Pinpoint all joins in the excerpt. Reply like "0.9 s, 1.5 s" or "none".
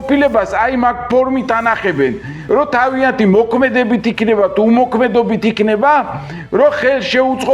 2.3 s